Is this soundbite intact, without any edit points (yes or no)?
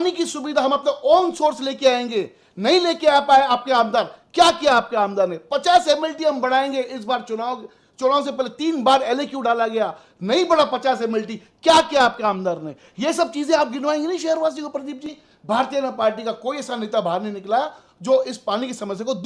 no